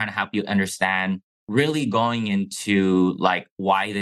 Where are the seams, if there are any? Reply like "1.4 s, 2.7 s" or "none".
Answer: 1.4 s